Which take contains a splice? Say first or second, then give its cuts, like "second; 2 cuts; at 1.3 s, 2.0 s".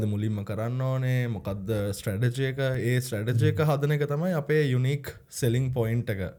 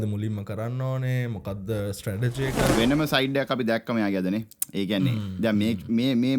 second; 1 cut; at 2.7 s